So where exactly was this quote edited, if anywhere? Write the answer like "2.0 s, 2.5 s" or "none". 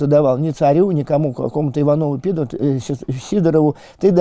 none

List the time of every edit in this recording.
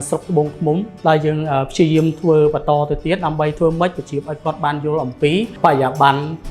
0.9 s, 5.5 s

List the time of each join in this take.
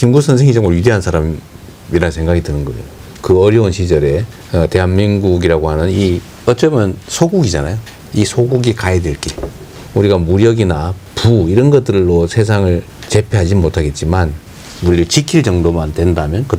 none

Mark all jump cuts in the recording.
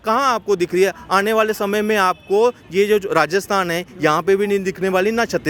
none

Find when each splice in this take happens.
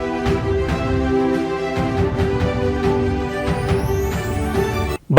3.6 s

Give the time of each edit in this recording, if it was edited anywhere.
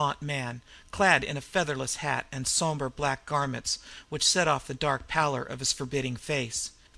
1.6 s

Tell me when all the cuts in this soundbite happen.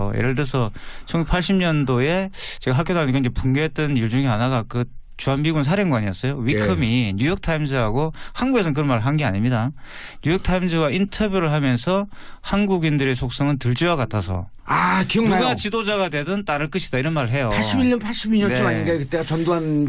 none

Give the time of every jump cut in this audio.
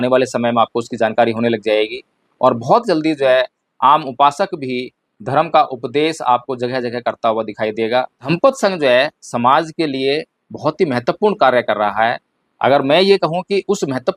8.3 s

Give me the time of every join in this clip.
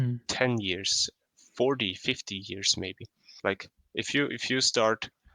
3.3 s

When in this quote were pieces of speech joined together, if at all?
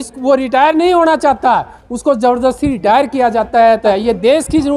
3.8 s

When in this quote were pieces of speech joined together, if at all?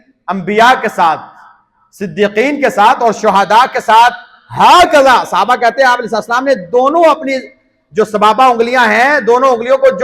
none

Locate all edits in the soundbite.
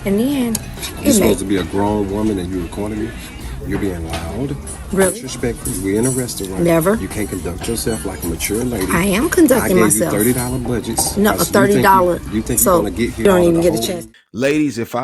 13.9 s

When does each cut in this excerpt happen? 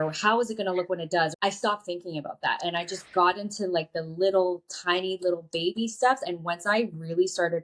1.3 s, 6.2 s

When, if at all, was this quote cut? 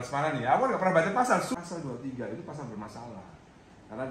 1.5 s

